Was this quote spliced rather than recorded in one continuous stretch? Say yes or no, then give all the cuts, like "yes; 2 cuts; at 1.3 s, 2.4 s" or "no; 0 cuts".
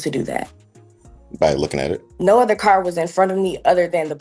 yes; 1 cut; at 2.1 s